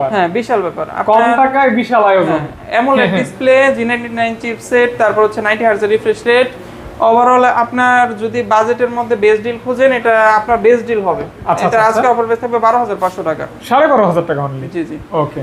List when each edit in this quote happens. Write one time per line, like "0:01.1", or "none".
none

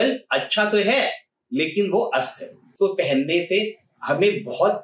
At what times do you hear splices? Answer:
0:02.7

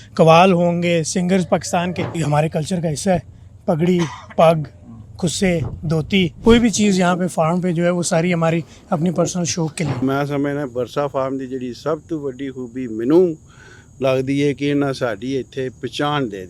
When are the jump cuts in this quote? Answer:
0:02.1
0:06.3
0:09.9

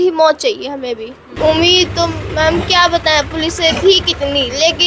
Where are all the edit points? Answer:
0:01.2

